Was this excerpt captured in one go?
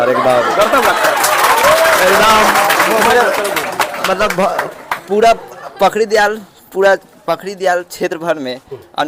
yes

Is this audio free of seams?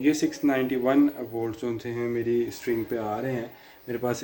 yes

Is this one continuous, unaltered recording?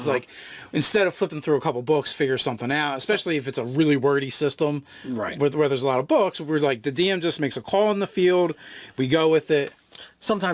yes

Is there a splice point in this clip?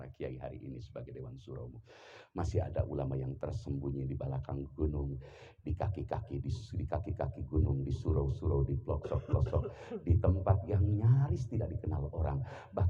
no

